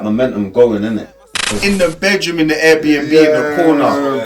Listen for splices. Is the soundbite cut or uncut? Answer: cut